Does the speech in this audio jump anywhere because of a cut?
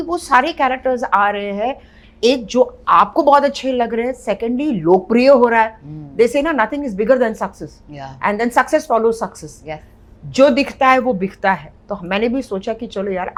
no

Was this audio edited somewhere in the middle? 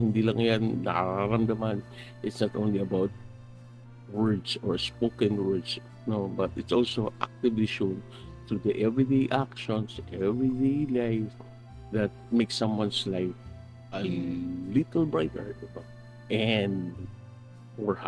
no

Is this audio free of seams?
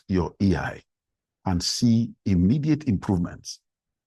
yes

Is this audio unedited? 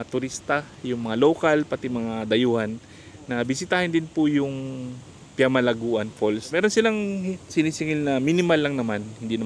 no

